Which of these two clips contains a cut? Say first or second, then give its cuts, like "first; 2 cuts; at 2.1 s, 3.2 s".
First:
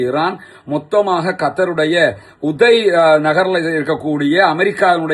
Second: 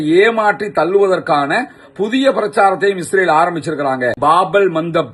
second; 1 cut; at 4.2 s